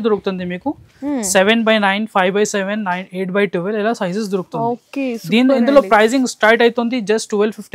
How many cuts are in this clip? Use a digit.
0